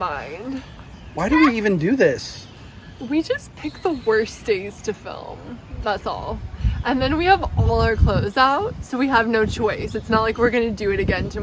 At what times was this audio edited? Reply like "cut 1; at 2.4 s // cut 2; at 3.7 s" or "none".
none